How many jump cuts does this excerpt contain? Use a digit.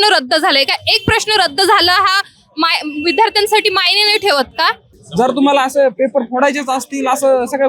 1